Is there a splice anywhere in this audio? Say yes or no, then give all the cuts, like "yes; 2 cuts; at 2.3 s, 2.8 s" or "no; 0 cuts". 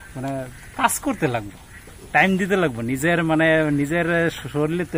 no; 0 cuts